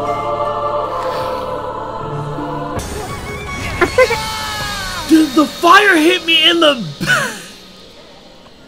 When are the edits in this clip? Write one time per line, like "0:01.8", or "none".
0:02.8